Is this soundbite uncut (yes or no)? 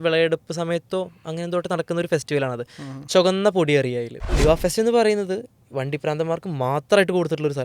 no